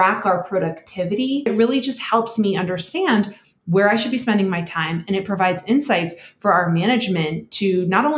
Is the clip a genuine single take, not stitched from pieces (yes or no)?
no